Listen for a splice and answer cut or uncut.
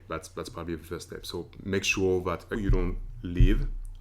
cut